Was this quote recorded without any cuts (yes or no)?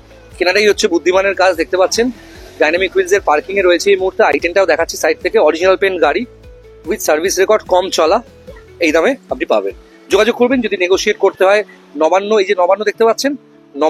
yes